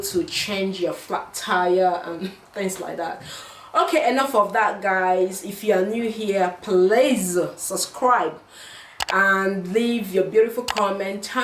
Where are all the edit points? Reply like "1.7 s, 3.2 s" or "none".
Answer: none